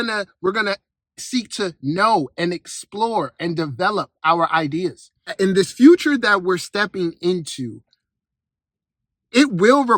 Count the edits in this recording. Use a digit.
1